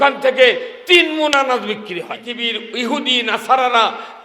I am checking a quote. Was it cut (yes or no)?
yes